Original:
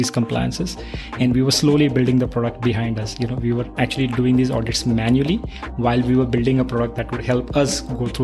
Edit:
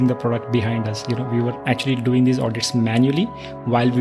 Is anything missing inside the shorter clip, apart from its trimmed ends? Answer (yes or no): no